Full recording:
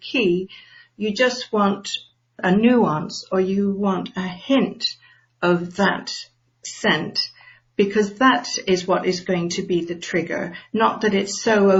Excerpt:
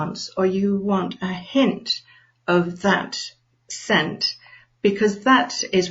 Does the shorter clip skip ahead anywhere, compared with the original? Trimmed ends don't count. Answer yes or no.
no